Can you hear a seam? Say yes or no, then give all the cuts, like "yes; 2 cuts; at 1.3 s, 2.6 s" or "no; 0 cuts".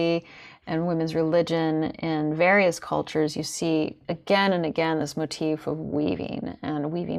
no; 0 cuts